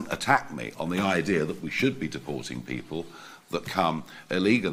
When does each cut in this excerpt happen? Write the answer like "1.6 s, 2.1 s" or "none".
none